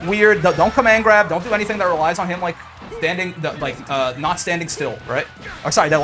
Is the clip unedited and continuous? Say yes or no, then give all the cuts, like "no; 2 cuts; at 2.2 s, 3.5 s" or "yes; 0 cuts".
yes; 0 cuts